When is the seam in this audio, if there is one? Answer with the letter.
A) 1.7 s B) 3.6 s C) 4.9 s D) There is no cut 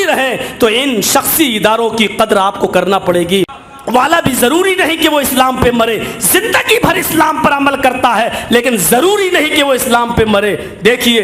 B